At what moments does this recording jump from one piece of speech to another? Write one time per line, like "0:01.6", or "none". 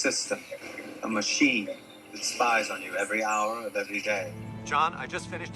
0:04.6